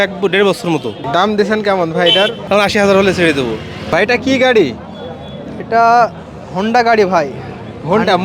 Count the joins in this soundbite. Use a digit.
3